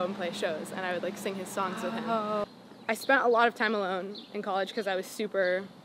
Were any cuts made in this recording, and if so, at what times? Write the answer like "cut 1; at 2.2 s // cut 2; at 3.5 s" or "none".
cut 1; at 2.4 s